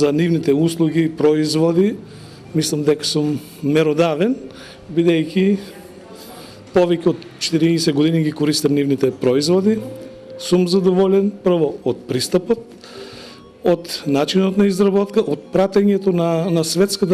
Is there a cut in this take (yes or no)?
no